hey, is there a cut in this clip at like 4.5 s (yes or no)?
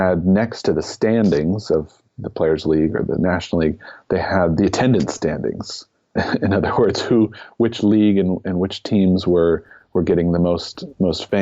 yes